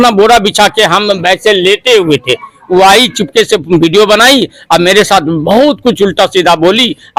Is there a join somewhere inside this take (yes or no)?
no